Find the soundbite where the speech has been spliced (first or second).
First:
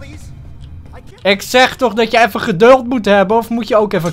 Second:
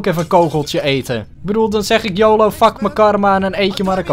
second